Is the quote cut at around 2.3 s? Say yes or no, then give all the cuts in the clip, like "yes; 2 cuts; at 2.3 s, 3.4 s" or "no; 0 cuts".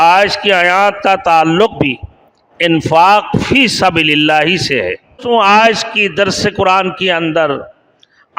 no; 1 cut; at 5.2 s